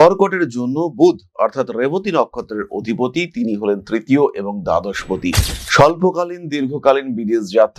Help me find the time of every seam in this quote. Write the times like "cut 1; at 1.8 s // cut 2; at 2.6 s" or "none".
none